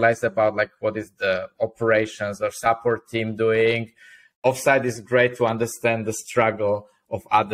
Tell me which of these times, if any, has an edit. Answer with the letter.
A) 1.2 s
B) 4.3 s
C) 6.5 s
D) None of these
B